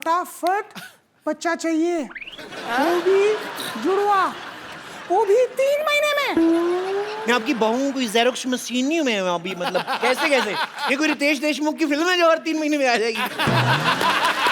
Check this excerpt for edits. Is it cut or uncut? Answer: uncut